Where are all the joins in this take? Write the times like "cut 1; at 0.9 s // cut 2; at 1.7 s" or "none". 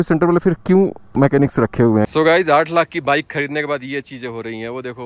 cut 1; at 2.1 s